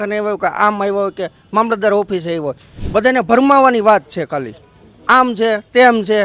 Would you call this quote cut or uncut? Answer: cut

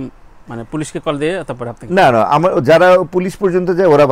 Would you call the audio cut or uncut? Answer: uncut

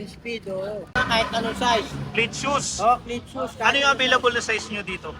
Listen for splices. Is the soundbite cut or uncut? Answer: cut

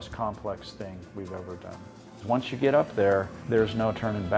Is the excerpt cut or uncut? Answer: cut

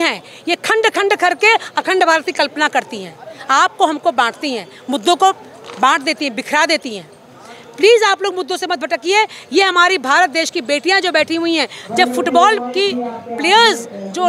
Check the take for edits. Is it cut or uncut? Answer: uncut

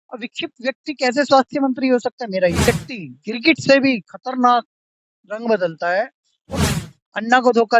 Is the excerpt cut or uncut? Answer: cut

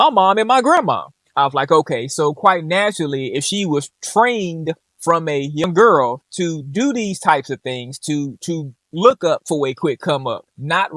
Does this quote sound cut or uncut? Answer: cut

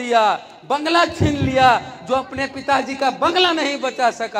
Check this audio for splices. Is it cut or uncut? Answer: uncut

